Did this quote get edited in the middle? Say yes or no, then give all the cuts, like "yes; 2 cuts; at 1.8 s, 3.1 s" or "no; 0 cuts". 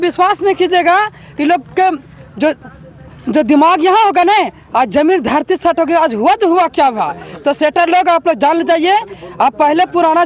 no; 0 cuts